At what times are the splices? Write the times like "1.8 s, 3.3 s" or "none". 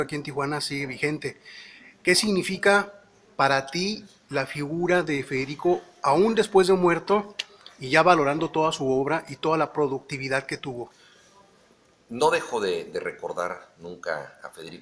8.9 s